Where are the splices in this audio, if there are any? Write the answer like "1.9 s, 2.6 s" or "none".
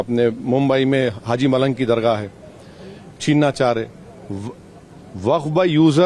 none